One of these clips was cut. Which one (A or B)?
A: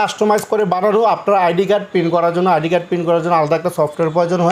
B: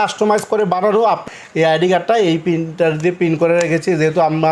B